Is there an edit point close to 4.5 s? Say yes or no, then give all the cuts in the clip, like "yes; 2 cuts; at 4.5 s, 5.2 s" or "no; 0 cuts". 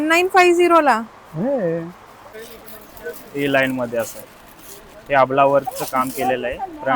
no; 1 cut; at 2.5 s